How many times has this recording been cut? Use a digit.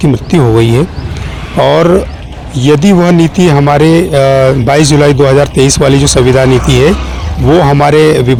0